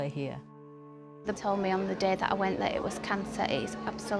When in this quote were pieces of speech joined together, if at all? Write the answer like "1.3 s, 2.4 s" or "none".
0.9 s